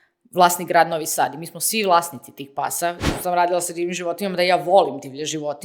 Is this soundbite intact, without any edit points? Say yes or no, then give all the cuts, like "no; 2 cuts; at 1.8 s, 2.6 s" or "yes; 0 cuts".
no; 1 cut; at 3.0 s